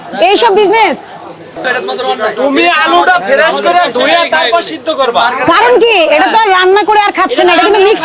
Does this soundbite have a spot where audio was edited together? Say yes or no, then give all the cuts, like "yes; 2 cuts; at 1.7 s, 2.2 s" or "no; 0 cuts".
yes; 1 cut; at 1.6 s